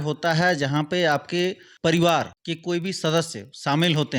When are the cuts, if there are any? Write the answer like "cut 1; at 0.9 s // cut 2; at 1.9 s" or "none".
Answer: cut 1; at 1.7 s // cut 2; at 2.4 s